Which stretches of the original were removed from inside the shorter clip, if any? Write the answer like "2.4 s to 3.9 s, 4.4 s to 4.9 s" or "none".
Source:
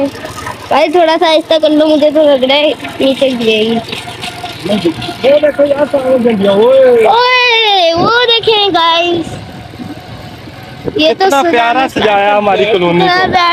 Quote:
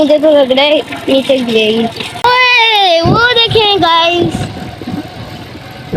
4.2 s to 7.2 s